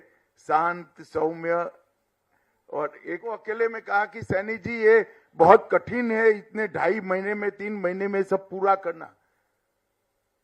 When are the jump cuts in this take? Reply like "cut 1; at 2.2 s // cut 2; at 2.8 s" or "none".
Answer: cut 1; at 3.3 s